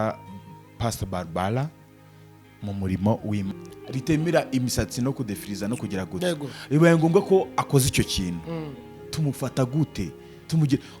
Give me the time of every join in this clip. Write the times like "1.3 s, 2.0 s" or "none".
3.5 s